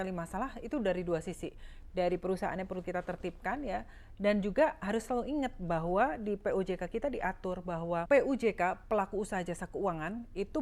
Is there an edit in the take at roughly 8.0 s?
yes; 1 cut; at 8.0 s

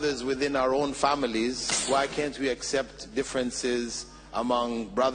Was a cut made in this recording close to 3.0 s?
no; 1 cut; at 1.7 s

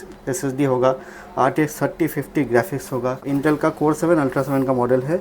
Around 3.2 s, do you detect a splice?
yes; 1 cut; at 3.2 s

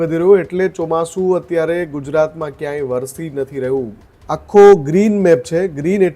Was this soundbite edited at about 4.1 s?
yes; 1 cut; at 4.1 s

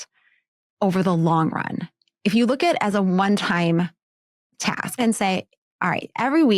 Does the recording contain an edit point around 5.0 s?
yes; 1 cut; at 5.0 s

